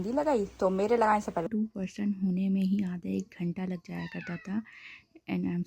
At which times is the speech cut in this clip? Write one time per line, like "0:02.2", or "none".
0:01.5